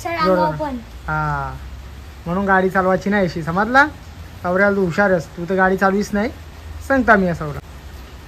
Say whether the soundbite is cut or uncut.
uncut